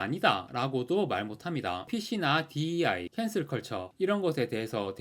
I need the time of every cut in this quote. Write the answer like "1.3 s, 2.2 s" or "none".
1.9 s